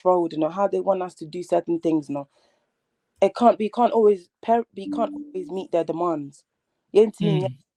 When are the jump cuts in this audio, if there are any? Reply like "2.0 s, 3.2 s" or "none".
none